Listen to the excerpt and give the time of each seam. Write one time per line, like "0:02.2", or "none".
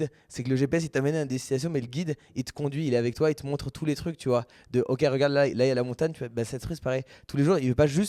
none